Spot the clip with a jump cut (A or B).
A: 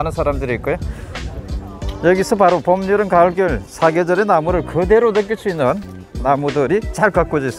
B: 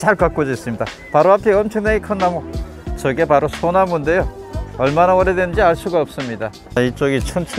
B